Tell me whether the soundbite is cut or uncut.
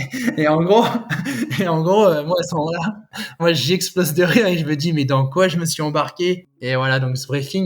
cut